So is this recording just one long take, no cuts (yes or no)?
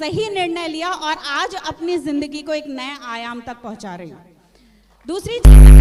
yes